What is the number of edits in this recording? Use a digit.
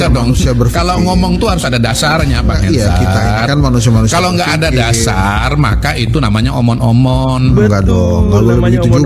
0